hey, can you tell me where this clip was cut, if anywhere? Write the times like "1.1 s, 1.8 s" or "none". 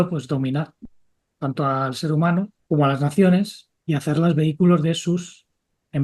2.6 s